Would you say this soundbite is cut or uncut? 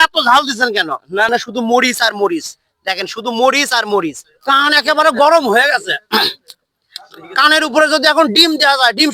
cut